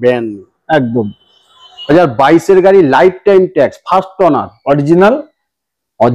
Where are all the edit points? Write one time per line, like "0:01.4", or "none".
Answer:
0:01.9